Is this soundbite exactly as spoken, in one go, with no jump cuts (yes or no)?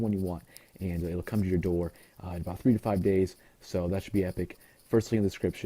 no